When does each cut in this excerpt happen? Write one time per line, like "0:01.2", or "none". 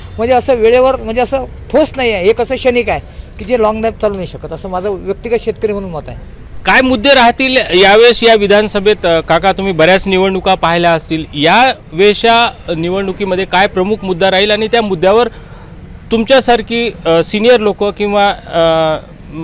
none